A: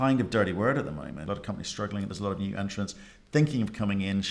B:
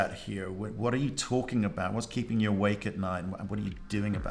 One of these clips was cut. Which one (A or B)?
A